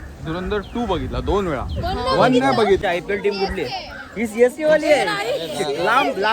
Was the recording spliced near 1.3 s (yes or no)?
no